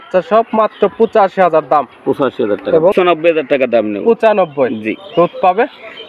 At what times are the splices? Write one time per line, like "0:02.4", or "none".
0:02.9